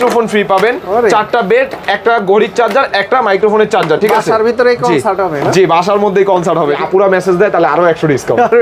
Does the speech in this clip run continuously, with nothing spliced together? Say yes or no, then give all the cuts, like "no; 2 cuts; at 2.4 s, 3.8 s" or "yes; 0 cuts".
no; 1 cut; at 6.7 s